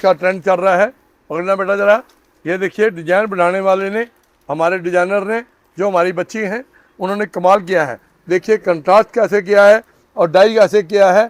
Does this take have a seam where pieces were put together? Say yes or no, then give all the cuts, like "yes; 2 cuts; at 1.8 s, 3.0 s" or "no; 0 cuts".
no; 0 cuts